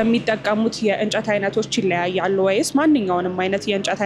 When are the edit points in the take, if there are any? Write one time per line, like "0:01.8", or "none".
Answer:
none